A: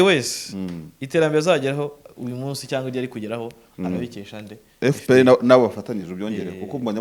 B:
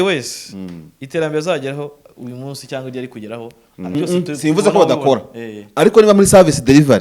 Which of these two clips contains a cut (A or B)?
B